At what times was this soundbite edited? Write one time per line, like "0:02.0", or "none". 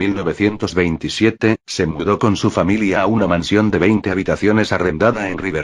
0:01.6